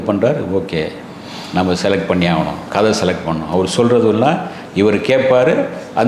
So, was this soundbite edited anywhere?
no; 0 cuts

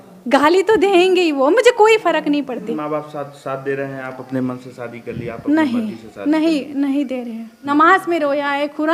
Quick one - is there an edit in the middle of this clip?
yes; 2 cuts; at 2.7 s, 7.7 s

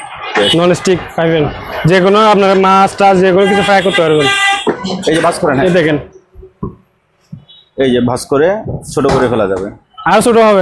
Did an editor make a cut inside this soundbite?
yes; 1 cut; at 4.9 s

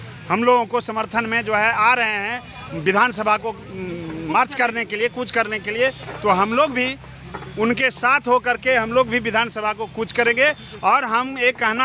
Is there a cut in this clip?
no; 0 cuts

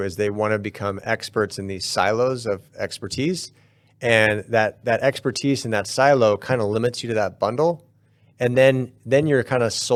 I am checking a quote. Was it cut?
no; 0 cuts

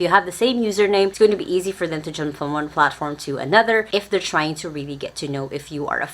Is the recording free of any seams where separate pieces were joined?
no; 2 cuts; at 1.1 s, 3.9 s

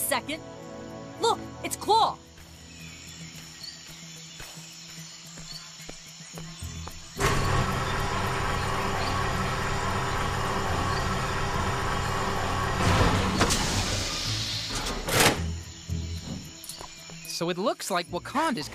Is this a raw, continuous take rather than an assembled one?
no; 1 cut; at 13.5 s

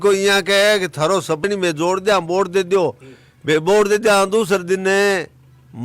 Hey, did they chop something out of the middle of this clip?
yes; 1 cut; at 1.5 s

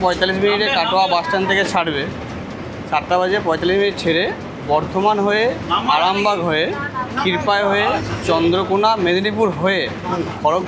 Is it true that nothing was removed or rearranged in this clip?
yes; 0 cuts

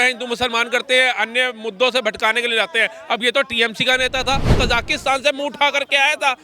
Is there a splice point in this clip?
yes; 1 cut; at 4.6 s

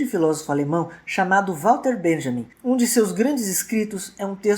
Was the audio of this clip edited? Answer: yes; 1 cut; at 2.5 s

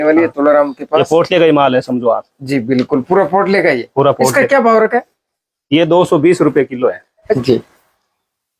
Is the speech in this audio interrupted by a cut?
yes; 1 cut; at 7.4 s

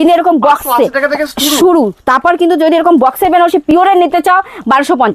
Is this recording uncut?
yes; 0 cuts

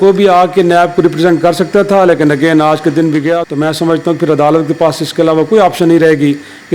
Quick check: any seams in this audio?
yes; 1 cut; at 3.4 s

